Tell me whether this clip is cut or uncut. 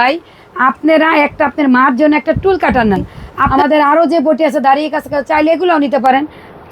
cut